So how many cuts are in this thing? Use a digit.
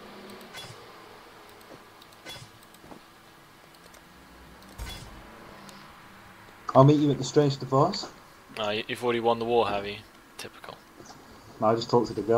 0